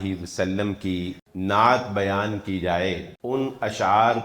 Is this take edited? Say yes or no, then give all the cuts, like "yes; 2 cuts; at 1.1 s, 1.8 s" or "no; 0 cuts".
yes; 2 cuts; at 1.2 s, 3.1 s